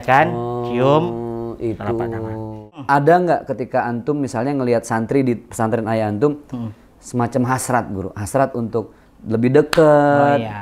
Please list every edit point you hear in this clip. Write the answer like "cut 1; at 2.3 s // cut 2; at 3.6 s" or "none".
cut 1; at 2.7 s